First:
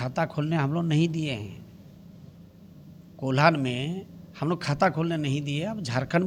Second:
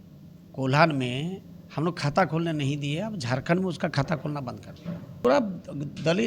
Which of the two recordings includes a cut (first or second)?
second